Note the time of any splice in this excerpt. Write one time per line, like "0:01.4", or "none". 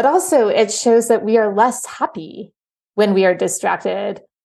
none